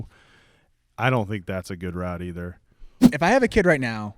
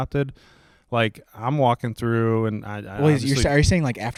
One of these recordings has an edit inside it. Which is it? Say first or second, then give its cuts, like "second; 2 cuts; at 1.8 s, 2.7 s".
first; 1 cut; at 3.2 s